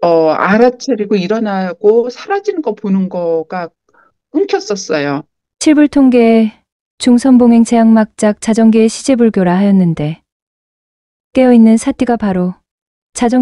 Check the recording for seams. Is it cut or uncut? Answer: cut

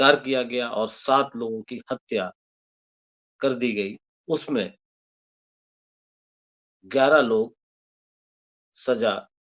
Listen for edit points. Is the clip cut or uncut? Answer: cut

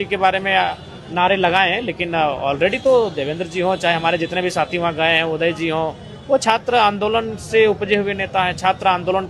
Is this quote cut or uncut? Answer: uncut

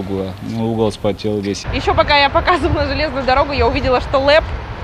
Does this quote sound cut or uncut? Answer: cut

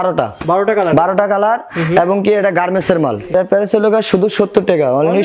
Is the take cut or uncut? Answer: cut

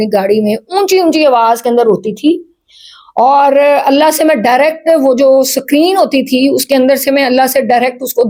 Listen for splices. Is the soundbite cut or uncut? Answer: uncut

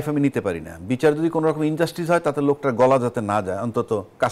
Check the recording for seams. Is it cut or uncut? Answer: uncut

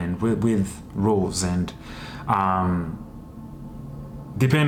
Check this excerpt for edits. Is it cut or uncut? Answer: uncut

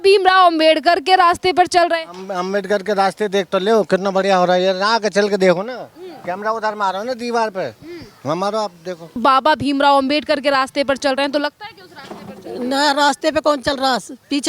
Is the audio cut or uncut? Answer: cut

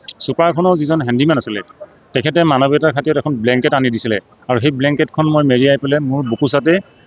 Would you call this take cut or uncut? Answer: uncut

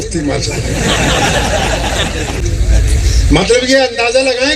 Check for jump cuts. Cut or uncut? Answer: cut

